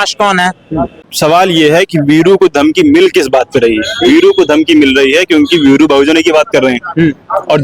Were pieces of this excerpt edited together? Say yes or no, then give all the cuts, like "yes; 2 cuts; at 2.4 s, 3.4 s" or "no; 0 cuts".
yes; 1 cut; at 1.0 s